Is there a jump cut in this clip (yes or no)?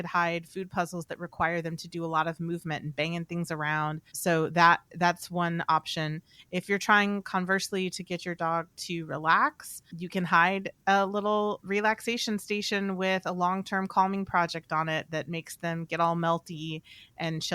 yes